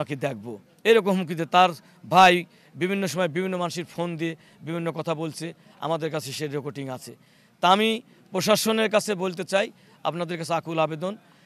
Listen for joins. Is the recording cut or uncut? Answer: uncut